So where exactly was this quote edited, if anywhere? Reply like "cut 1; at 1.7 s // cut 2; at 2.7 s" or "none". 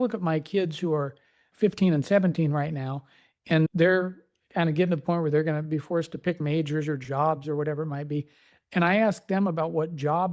cut 1; at 1.4 s // cut 2; at 3.7 s